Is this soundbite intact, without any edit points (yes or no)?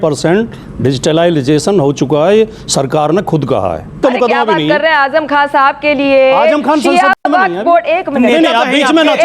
no